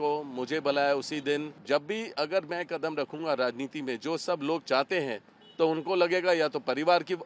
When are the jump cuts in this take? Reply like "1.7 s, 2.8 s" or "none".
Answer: 1.5 s